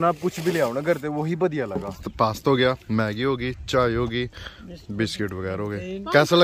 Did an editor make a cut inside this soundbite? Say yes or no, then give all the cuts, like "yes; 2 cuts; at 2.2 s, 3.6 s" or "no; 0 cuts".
yes; 1 cut; at 2.0 s